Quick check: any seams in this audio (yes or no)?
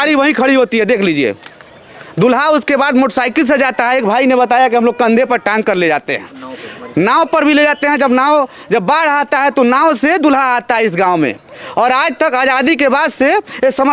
no